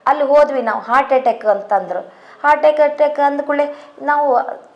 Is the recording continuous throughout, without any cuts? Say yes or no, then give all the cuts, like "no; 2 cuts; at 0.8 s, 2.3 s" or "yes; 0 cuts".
yes; 0 cuts